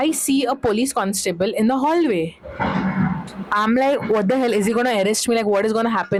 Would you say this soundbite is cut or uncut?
uncut